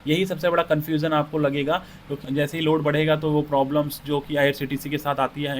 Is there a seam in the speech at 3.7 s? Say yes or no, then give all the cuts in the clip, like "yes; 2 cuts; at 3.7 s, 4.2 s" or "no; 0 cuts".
no; 1 cut; at 2.2 s